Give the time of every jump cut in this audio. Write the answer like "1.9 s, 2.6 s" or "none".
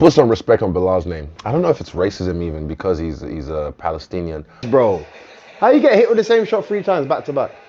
1.2 s, 4.7 s